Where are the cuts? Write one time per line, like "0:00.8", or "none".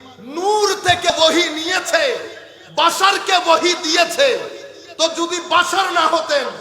0:01.1